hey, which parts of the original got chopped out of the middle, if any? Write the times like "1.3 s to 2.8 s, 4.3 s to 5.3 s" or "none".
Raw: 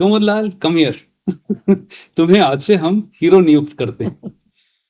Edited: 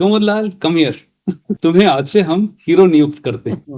1.5 s to 2.0 s